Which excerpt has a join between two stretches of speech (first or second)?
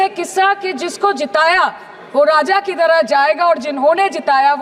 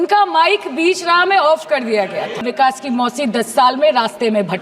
second